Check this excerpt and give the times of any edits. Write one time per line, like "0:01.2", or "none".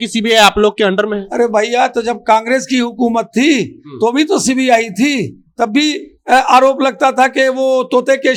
none